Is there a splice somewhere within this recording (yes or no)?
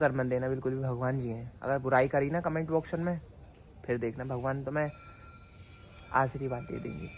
no